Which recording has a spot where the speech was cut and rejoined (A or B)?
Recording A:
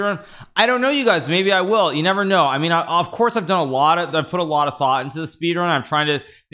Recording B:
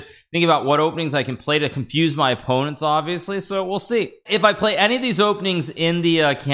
B